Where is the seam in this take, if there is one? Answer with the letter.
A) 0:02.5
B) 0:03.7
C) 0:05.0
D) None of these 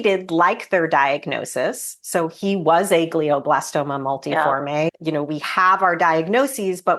C